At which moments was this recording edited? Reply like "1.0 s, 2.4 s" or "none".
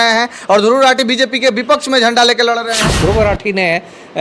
3.0 s